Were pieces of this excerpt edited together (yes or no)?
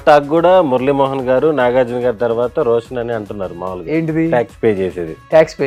no